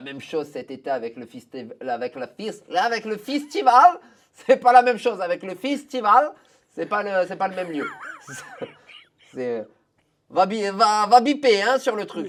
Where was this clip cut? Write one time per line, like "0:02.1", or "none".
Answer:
none